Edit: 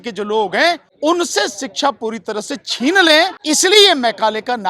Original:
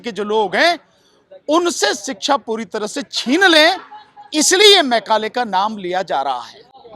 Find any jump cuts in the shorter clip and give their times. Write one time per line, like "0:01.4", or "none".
0:00.9
0:03.4